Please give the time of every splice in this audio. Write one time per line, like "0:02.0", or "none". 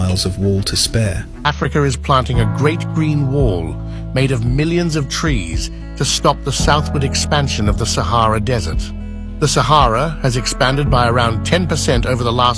0:01.3